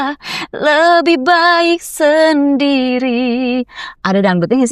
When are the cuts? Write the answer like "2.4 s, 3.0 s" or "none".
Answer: none